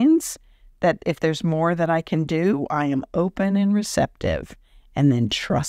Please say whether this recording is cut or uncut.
uncut